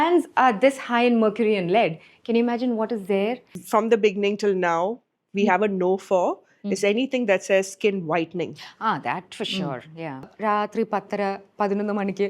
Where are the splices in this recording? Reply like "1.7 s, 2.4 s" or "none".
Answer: 3.5 s, 10.3 s

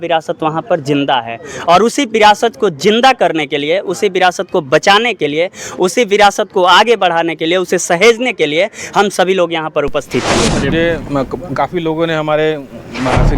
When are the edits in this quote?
10.7 s

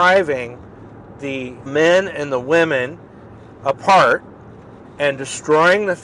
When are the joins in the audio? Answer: 1.7 s

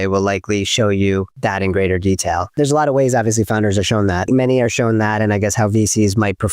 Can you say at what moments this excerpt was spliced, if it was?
1.3 s, 2.5 s, 4.3 s

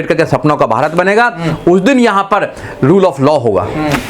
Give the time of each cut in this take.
none

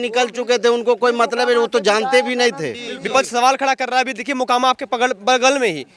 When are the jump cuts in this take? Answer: 2.9 s

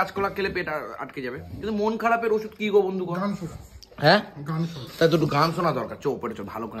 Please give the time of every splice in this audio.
none

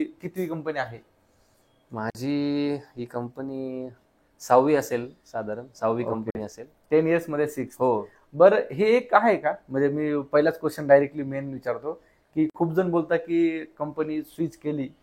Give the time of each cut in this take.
none

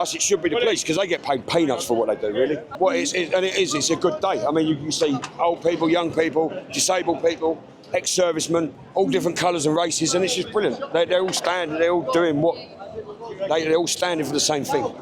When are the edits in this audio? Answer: 2.7 s, 8.8 s

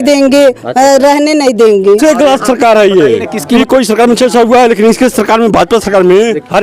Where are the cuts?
2.0 s, 3.6 s

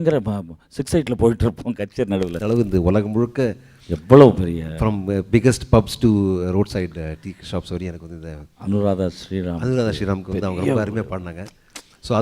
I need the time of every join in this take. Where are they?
2.4 s

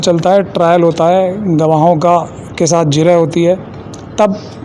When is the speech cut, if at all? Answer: none

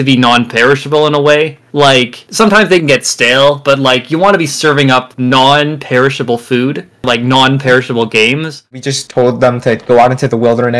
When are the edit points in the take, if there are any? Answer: 8.7 s

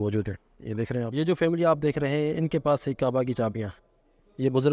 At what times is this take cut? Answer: 1.1 s

